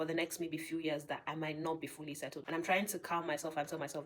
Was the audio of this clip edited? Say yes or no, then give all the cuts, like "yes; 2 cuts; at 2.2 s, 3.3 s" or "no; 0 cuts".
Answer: yes; 1 cut; at 2.4 s